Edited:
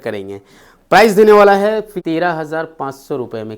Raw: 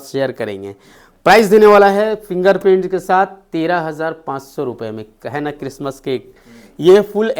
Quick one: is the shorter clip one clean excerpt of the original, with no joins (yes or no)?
no